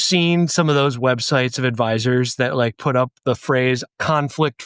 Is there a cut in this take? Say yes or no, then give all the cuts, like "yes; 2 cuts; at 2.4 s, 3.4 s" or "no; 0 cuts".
no; 0 cuts